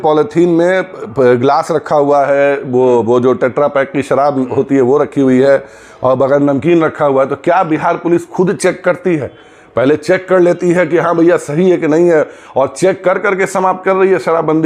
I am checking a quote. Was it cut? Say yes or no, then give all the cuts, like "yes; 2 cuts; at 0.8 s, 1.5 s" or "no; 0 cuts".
no; 0 cuts